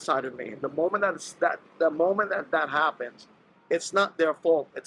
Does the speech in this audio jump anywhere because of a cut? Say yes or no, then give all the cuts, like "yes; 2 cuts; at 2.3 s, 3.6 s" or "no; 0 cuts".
no; 0 cuts